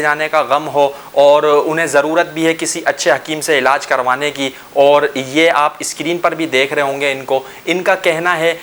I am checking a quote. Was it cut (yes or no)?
no